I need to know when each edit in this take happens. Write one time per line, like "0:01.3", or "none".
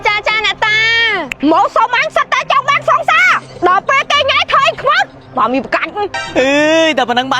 0:06.2